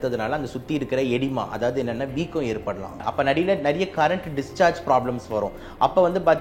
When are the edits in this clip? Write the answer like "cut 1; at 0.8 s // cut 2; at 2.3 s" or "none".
cut 1; at 3.0 s

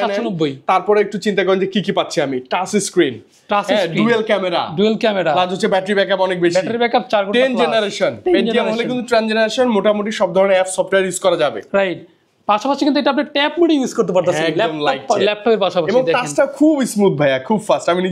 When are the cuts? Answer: none

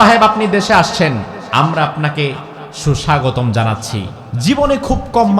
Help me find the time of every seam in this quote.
cut 1; at 1.4 s // cut 2; at 4.2 s

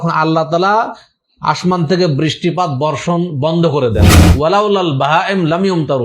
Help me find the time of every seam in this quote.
cut 1; at 4.2 s

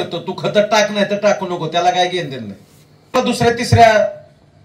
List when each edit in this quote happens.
cut 1; at 3.1 s

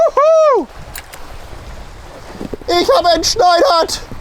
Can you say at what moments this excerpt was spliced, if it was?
cut 1; at 1.1 s

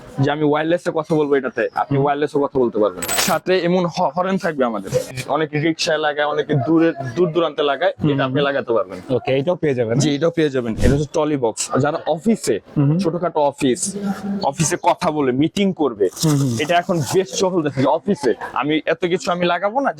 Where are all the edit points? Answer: cut 1; at 3.2 s // cut 2; at 5.1 s // cut 3; at 10.7 s

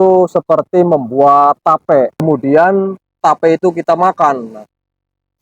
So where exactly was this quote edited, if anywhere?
cut 1; at 2.2 s

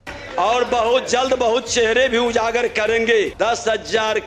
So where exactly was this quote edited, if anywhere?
cut 1; at 3.3 s

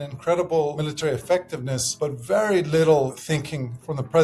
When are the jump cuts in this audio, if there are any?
cut 1; at 0.8 s // cut 2; at 1.8 s // cut 3; at 3.4 s

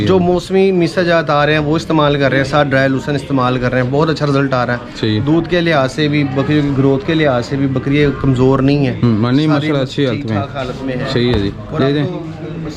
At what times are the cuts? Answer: none

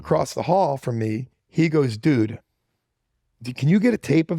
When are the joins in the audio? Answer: cut 1; at 1.3 s

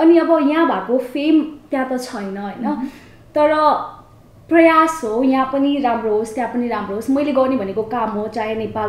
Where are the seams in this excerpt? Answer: none

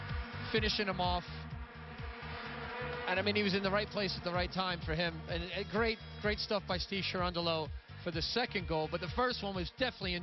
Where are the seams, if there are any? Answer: cut 1; at 6.3 s

